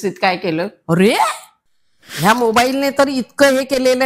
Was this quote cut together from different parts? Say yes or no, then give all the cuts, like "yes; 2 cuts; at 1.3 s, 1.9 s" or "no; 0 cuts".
yes; 1 cut; at 2.1 s